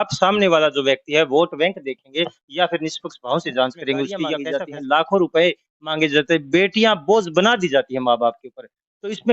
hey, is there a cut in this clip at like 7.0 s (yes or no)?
no